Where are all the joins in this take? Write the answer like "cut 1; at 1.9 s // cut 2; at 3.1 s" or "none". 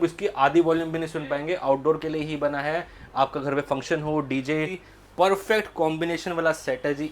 cut 1; at 4.8 s